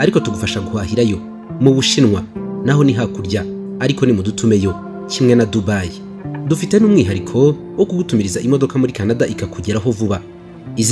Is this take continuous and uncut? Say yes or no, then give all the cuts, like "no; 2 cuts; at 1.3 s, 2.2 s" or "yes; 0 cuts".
yes; 0 cuts